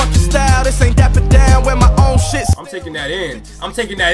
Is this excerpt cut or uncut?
cut